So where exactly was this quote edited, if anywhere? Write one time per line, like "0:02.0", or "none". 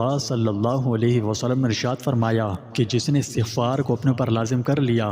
0:02.6